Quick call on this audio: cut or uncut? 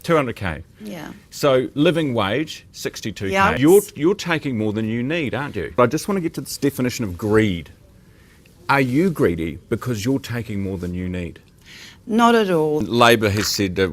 cut